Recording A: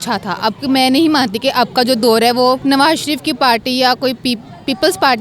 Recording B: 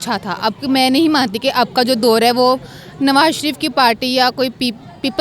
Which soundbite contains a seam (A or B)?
A